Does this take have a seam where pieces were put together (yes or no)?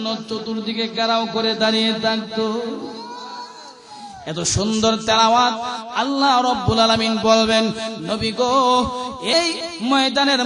yes